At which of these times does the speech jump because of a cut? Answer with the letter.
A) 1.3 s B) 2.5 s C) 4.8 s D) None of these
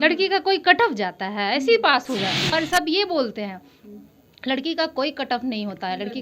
B